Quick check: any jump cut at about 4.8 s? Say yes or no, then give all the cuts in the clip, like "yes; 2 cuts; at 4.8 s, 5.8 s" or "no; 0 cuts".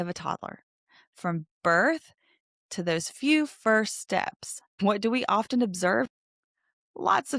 yes; 2 cuts; at 4.8 s, 6.1 s